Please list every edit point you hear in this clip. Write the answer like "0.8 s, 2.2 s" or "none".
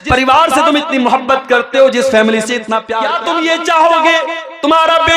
3.0 s

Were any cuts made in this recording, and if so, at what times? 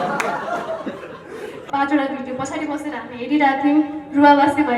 1.6 s

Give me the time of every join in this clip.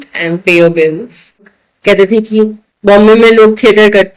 1.5 s

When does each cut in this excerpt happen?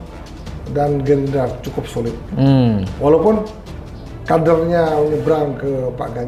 none

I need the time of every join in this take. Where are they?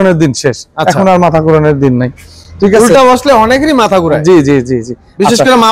none

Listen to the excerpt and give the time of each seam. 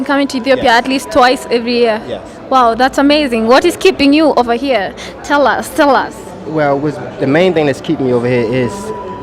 none

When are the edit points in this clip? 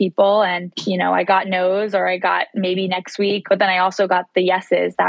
1.3 s, 3.4 s

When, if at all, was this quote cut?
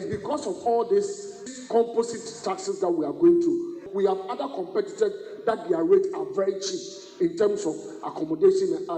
1.5 s, 3.8 s

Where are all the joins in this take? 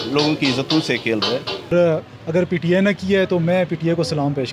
1.7 s

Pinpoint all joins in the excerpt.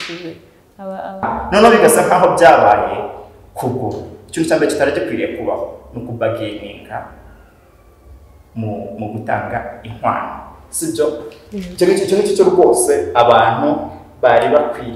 1.3 s

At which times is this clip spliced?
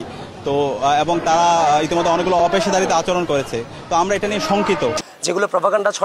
5.1 s

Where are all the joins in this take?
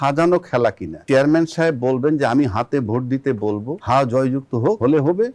1.0 s

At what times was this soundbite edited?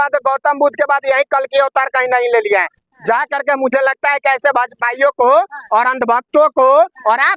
none

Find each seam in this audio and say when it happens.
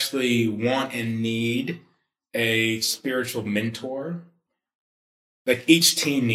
4.4 s

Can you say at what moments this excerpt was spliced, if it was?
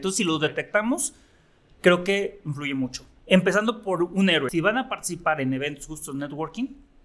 4.5 s

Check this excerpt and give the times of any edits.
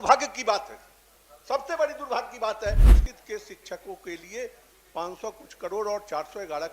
2.9 s

